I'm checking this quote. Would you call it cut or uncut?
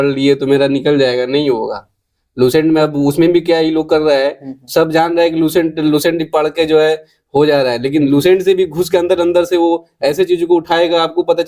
uncut